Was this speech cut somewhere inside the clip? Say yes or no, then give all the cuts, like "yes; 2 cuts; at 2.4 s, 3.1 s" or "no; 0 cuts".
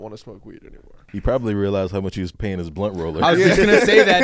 yes; 2 cuts; at 1.0 s, 2.3 s